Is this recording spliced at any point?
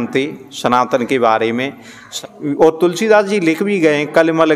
yes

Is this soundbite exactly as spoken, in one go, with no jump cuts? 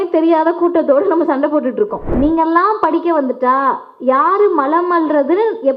no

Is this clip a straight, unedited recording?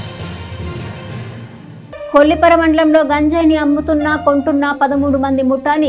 no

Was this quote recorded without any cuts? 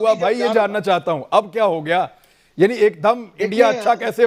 yes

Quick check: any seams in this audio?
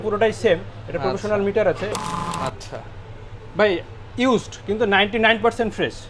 yes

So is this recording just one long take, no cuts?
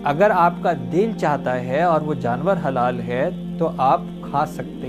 yes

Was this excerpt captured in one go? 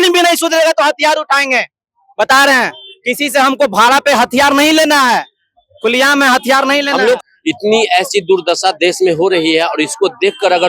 no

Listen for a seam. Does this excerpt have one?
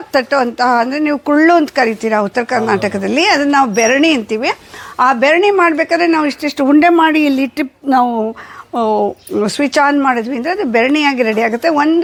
no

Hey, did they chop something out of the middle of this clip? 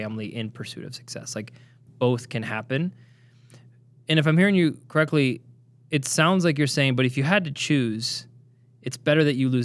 no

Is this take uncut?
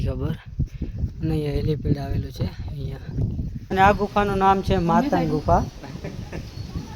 no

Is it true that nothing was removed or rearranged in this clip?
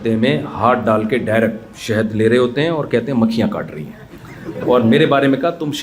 yes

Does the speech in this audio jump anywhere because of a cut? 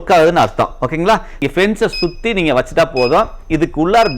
yes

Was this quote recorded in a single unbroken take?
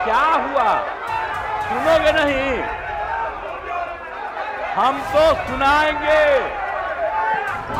yes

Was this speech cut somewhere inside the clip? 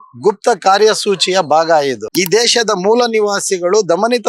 yes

